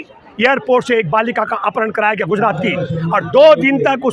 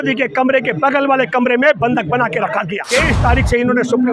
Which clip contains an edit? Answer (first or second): second